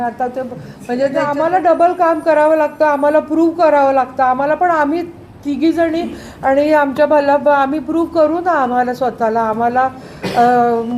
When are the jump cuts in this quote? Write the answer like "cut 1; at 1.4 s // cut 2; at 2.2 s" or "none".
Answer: cut 1; at 1.2 s